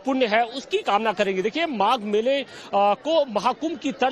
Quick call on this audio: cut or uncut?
cut